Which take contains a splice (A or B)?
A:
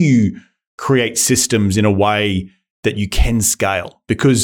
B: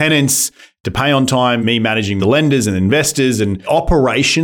B